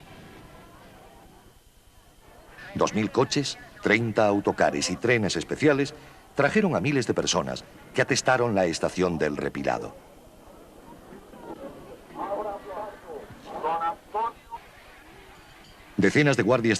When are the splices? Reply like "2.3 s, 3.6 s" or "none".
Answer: 1.9 s